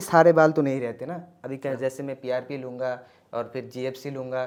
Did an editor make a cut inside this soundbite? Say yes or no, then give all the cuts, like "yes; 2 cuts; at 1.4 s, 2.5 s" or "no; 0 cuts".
no; 0 cuts